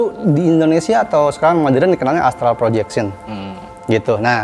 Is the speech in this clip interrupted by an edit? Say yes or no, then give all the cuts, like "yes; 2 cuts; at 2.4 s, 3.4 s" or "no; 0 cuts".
no; 0 cuts